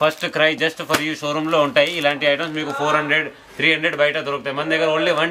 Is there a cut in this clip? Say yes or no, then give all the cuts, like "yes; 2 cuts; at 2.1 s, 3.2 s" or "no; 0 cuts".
no; 0 cuts